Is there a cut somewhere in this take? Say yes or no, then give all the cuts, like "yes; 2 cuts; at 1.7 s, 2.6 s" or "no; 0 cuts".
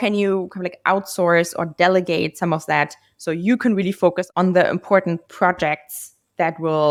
no; 0 cuts